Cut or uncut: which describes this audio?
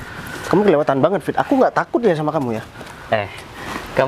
uncut